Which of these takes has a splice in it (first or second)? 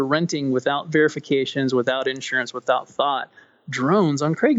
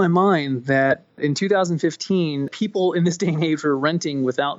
second